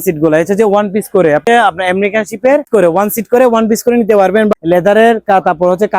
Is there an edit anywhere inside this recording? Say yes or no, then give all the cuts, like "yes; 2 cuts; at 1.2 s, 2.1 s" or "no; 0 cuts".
yes; 3 cuts; at 1.4 s, 2.7 s, 4.5 s